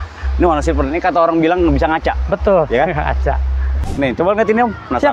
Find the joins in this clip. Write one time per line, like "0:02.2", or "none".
0:03.8